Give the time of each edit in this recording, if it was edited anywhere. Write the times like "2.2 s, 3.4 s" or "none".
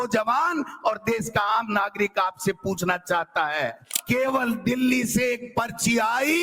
3.9 s

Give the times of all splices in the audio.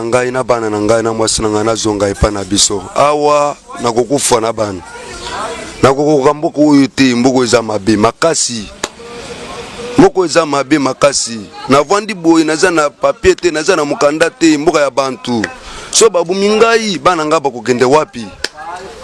none

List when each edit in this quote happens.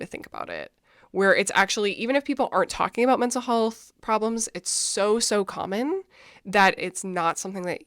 6.8 s

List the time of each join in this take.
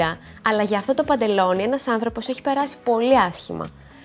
none

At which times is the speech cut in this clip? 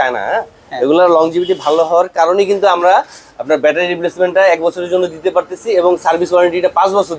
none

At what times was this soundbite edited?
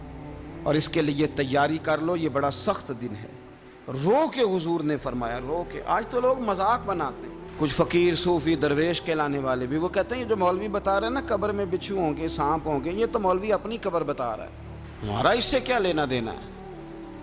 none

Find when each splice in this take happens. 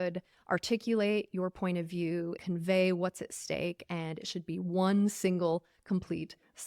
2.4 s

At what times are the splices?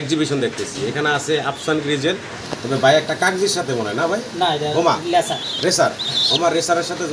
none

